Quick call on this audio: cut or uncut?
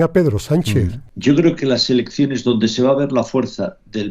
cut